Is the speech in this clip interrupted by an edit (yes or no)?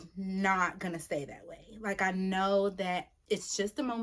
yes